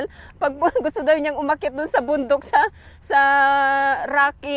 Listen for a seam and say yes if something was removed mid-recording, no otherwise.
no